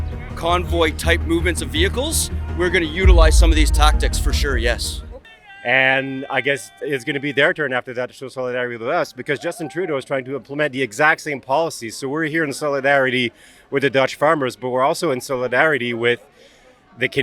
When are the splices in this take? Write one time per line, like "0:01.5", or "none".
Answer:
0:04.9